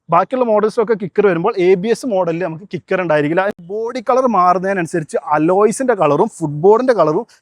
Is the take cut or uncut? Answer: cut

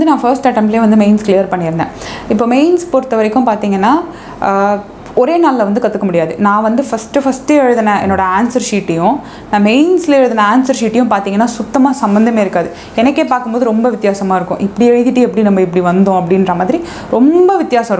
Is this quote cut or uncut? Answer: uncut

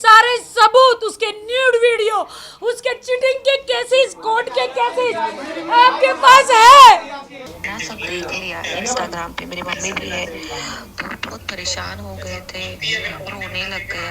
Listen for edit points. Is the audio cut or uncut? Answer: cut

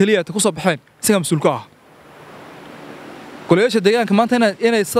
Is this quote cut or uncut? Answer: uncut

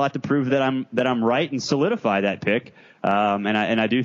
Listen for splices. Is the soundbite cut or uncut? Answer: uncut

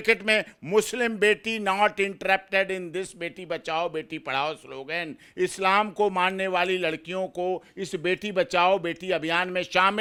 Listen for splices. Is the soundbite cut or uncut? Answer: uncut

